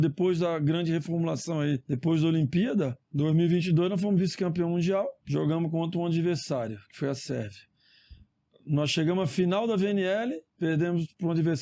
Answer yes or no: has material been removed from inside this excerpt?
yes